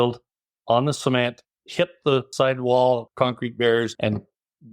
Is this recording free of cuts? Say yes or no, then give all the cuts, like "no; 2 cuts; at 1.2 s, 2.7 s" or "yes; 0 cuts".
no; 3 cuts; at 2.3 s, 3.1 s, 3.9 s